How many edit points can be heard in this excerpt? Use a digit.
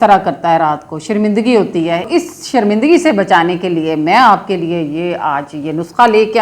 1